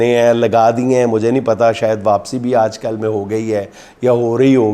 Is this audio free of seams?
yes; 0 cuts

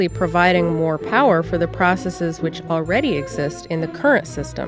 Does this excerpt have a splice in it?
no; 0 cuts

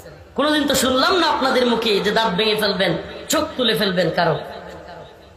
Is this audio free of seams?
yes; 0 cuts

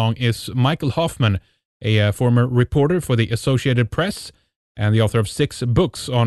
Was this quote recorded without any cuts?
no; 1 cut; at 3.7 s

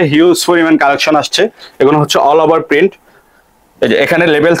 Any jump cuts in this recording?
no; 0 cuts

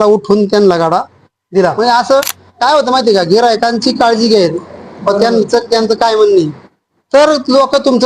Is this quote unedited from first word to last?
no; 1 cut; at 1.7 s

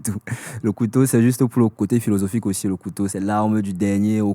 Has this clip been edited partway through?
yes; 2 cuts; at 1.5 s, 3.1 s

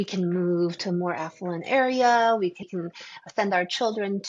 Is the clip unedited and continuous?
no; 1 cut; at 2.6 s

